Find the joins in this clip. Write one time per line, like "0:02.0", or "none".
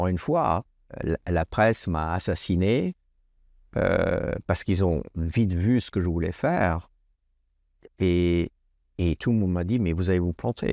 0:01.0